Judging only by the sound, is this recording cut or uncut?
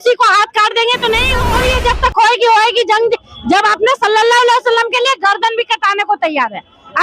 cut